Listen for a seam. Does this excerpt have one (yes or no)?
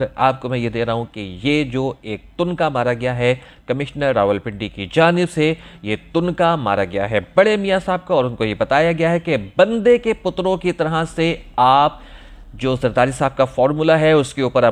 no